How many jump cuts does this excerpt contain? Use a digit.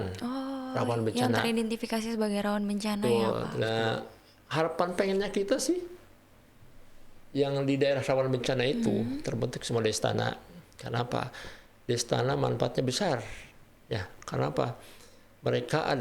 1